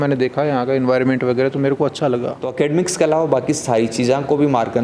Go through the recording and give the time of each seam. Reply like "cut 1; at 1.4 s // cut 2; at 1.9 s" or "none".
cut 1; at 2.4 s

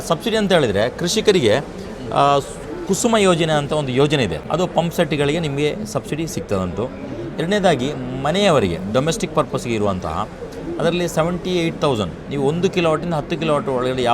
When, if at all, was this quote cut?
cut 1; at 4.4 s

